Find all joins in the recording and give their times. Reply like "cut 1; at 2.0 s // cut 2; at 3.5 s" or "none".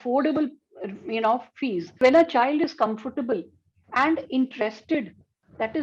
cut 1; at 2.0 s